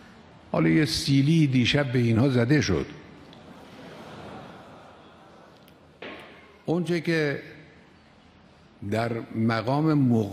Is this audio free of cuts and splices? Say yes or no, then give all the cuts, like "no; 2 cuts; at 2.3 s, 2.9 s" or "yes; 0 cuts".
no; 1 cut; at 6.2 s